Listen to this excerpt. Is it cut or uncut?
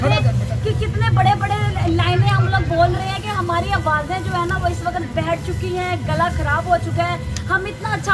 uncut